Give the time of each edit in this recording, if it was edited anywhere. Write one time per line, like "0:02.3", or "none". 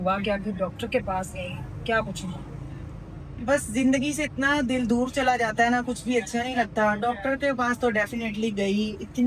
none